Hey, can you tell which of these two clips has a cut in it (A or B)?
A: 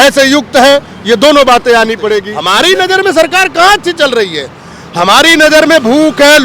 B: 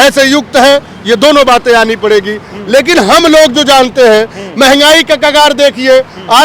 A